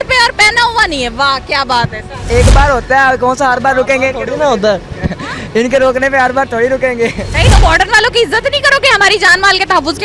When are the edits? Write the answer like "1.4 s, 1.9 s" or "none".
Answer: 2.3 s, 7.3 s